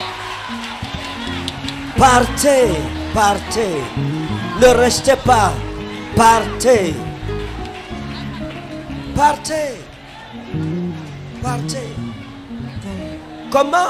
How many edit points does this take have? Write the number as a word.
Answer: zero